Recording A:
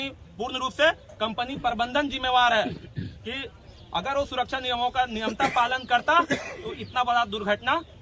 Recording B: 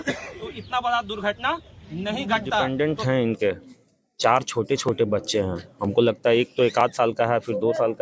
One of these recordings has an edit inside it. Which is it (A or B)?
B